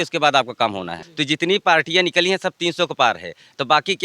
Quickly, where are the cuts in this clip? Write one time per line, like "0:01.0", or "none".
0:01.1